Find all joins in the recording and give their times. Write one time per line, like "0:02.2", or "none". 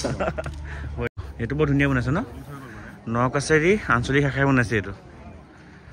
0:01.1